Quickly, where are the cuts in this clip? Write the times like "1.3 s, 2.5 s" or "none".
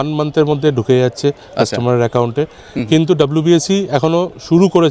none